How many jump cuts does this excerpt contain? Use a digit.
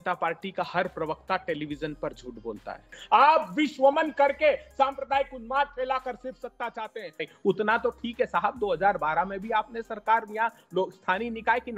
2